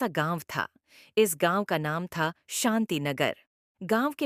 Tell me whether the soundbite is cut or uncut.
uncut